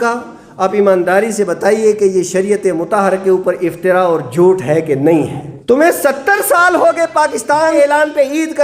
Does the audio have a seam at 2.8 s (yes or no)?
no